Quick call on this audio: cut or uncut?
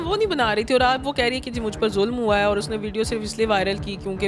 uncut